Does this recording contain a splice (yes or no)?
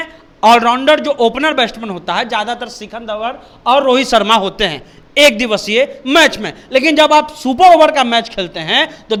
no